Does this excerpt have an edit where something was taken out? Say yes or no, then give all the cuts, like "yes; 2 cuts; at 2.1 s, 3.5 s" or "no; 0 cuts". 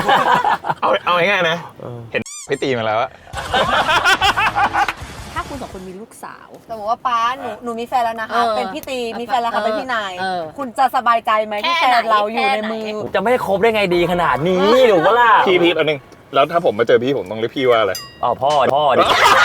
yes; 3 cuts; at 5.3 s, 6.7 s, 13.0 s